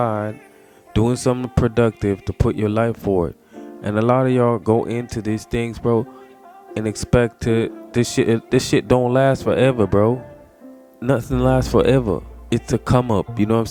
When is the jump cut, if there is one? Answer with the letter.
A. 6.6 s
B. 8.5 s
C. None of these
C